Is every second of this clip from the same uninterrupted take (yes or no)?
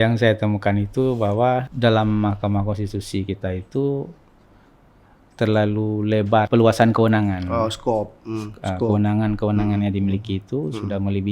no